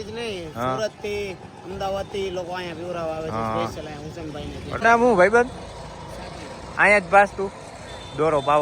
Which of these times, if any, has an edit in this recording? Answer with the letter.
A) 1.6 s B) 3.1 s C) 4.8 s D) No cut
C